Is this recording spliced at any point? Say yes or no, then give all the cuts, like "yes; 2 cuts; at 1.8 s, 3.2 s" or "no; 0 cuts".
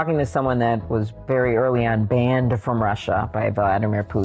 yes; 1 cut; at 1.2 s